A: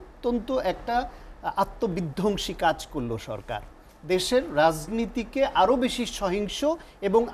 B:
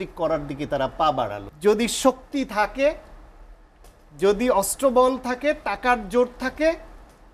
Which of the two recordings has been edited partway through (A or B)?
B